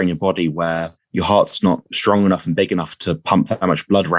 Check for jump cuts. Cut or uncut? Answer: cut